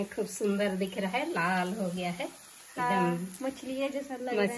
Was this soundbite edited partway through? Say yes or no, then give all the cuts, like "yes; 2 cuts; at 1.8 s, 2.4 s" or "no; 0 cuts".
no; 0 cuts